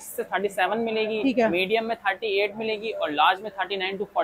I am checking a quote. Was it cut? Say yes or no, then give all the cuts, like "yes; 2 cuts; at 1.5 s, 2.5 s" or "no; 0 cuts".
no; 0 cuts